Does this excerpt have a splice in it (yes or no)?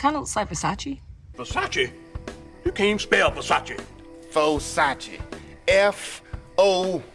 no